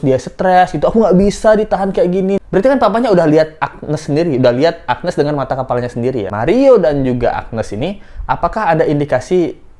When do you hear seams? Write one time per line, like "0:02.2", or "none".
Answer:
0:02.4
0:06.3